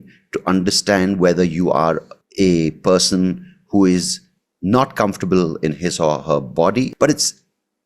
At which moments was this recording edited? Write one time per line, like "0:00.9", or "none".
0:06.9